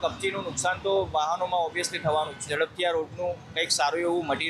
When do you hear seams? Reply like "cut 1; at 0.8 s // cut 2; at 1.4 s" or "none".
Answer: cut 1; at 2.4 s